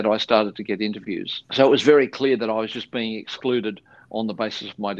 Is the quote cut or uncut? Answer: uncut